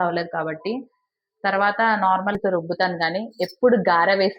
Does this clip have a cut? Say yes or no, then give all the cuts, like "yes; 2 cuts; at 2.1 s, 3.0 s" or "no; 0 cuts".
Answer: yes; 1 cut; at 2.4 s